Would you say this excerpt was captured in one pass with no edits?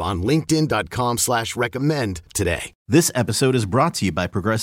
no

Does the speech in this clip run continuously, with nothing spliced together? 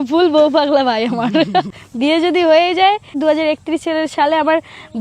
no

